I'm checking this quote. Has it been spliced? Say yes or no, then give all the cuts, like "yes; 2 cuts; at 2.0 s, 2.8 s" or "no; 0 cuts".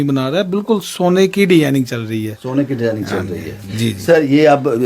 no; 0 cuts